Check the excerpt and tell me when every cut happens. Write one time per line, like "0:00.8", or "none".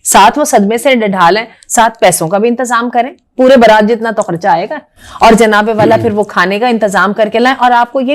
none